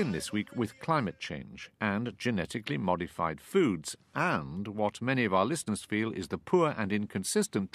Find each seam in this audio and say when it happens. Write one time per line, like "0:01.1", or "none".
0:06.4